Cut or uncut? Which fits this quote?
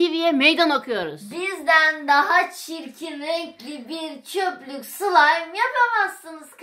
uncut